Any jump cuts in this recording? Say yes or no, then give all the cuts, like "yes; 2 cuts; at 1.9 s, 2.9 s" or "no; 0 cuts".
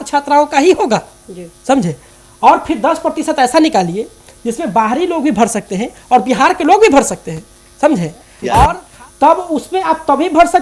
yes; 1 cut; at 8.9 s